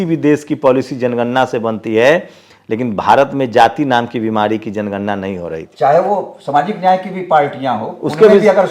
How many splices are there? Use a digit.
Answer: 1